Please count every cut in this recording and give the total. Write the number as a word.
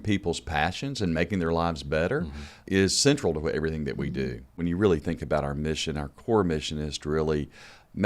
one